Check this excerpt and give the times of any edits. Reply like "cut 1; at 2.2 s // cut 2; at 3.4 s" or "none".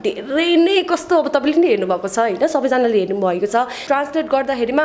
cut 1; at 3.8 s